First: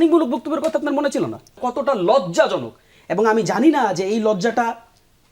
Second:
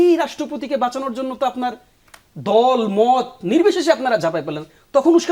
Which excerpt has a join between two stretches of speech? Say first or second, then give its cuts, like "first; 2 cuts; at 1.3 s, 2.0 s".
first; 1 cut; at 1.6 s